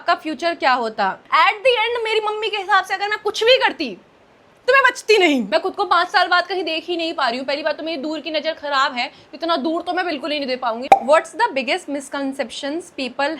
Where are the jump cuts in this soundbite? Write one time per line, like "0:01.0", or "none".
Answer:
0:01.2
0:05.5
0:10.8

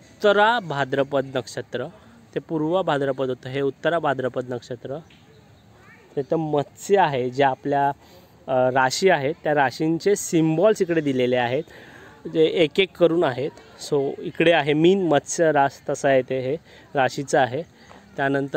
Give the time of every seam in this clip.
none

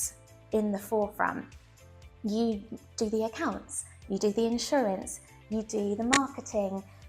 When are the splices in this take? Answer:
none

